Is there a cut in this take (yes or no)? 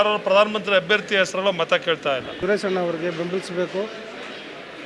yes